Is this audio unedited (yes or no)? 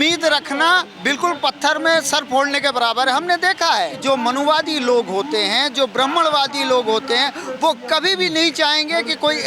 no